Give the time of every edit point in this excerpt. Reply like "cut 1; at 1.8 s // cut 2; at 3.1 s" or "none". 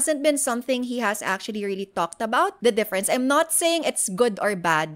cut 1; at 2.5 s